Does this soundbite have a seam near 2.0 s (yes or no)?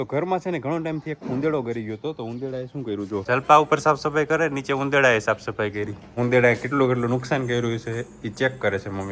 no